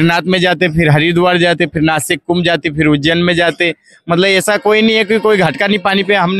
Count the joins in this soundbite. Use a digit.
0